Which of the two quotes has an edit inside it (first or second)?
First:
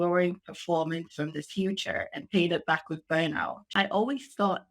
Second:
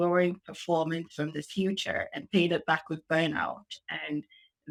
first